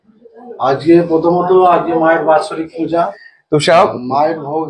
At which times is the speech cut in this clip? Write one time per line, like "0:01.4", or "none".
0:03.1